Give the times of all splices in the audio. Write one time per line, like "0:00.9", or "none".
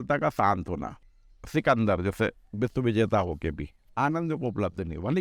0:01.0